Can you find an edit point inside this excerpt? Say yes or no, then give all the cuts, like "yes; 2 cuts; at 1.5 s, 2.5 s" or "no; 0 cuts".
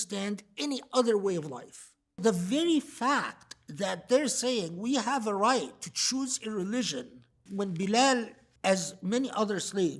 yes; 3 cuts; at 2.2 s, 7.4 s, 8.4 s